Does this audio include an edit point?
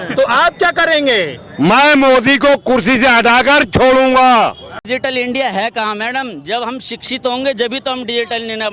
yes; 1 cut; at 4.7 s

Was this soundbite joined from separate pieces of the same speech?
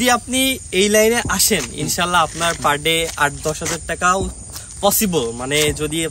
no; 0 cuts

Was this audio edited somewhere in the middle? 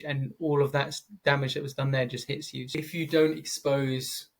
yes; 1 cut; at 2.7 s

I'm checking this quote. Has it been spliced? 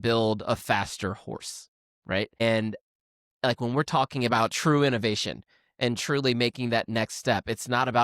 yes; 1 cut; at 2.4 s

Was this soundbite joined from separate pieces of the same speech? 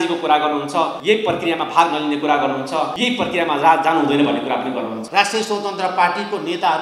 yes; 3 cuts; at 1.0 s, 3.0 s, 5.0 s

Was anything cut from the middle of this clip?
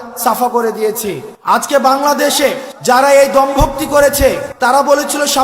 yes; 3 cuts; at 1.3 s, 2.7 s, 4.5 s

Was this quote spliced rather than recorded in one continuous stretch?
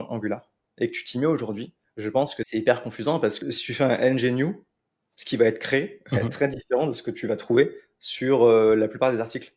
yes; 2 cuts; at 2.4 s, 3.4 s

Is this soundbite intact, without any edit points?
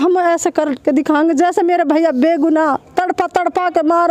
yes; 0 cuts

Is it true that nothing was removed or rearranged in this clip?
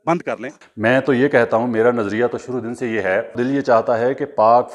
yes; 0 cuts

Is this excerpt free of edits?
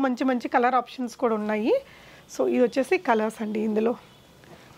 yes; 0 cuts

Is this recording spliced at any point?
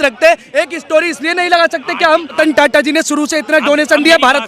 yes; 1 cut; at 2.4 s

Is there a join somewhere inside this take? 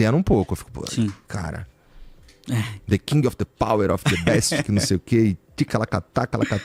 no; 0 cuts

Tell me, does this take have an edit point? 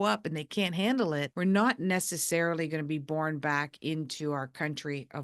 yes; 1 cut; at 1.3 s

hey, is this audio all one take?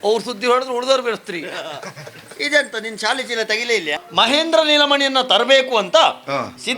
no; 1 cut; at 4.0 s

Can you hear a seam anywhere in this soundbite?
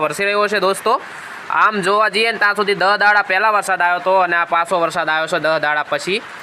no; 0 cuts

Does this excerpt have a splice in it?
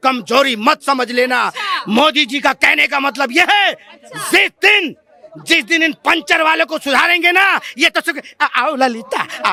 no; 0 cuts

